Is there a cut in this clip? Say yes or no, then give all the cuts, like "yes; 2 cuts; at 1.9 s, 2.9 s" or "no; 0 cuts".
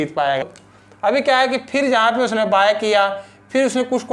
yes; 1 cut; at 0.9 s